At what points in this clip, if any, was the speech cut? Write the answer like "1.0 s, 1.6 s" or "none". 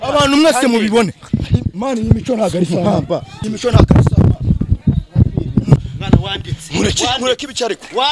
3.3 s, 5.8 s